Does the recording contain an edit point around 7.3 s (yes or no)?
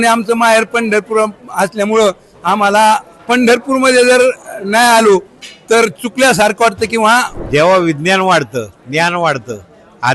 yes